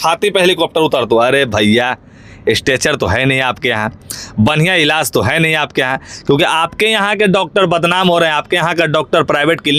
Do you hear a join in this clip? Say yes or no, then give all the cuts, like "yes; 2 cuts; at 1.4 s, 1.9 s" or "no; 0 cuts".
no; 0 cuts